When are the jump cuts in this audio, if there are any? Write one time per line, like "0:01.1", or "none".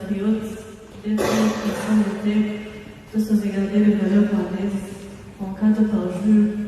0:02.2